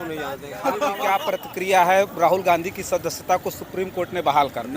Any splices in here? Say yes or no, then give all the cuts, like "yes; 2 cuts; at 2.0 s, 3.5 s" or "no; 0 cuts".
yes; 1 cut; at 1.3 s